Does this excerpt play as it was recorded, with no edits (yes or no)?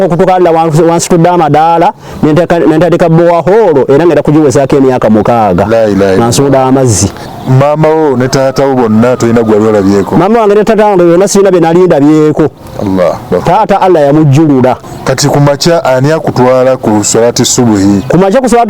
no